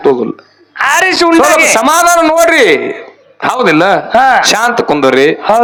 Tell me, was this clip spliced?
no; 0 cuts

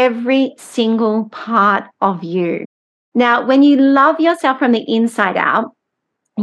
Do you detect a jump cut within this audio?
no; 0 cuts

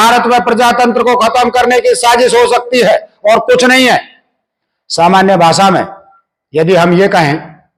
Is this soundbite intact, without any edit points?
yes; 0 cuts

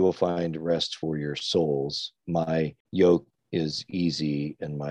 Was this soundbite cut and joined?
yes; 2 cuts; at 2.8 s, 3.4 s

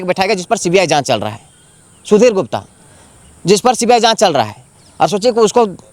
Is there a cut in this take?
no; 0 cuts

